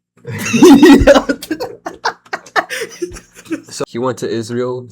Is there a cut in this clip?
yes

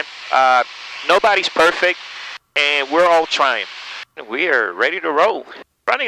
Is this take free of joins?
no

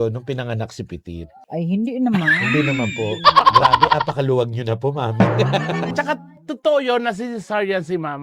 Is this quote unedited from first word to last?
no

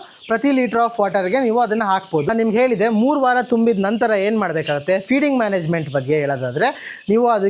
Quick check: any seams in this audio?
yes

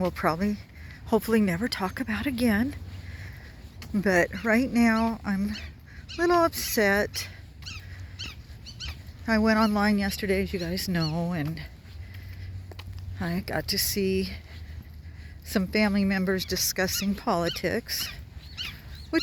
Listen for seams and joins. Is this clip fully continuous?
yes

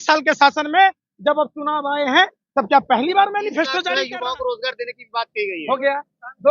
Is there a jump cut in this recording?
yes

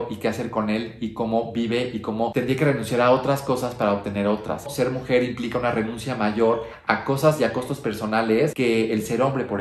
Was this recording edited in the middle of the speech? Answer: yes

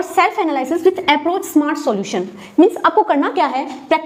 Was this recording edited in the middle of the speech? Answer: no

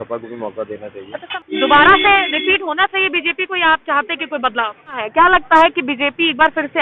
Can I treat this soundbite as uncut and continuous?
no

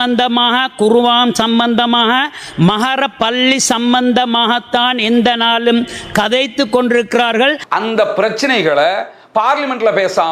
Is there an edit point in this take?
yes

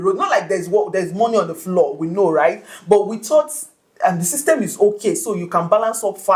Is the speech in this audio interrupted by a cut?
no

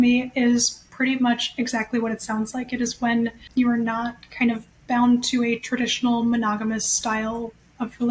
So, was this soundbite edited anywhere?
yes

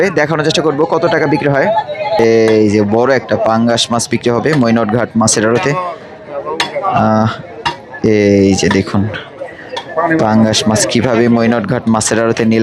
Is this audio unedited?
no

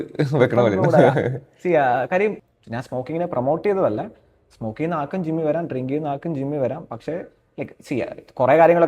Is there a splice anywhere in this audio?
yes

